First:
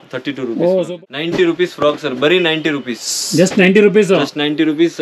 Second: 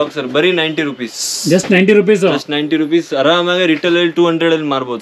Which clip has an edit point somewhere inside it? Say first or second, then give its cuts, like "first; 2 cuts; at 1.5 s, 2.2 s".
first; 1 cut; at 0.9 s